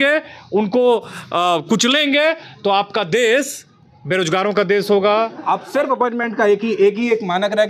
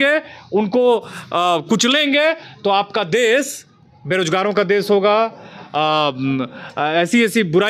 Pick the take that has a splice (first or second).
first